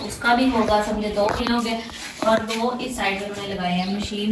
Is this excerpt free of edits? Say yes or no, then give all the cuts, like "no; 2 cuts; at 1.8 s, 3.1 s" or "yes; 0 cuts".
yes; 0 cuts